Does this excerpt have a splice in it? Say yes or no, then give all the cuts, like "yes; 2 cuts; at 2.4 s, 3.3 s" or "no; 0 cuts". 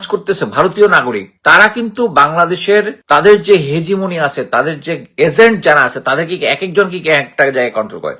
yes; 1 cut; at 3.0 s